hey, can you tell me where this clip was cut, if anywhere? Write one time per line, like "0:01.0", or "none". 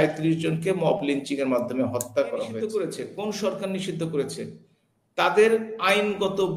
0:02.5